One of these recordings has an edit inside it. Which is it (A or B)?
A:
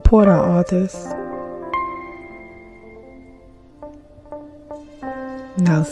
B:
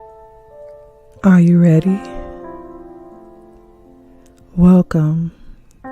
B